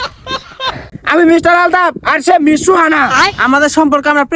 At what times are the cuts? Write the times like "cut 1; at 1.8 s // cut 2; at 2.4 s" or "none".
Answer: cut 1; at 0.9 s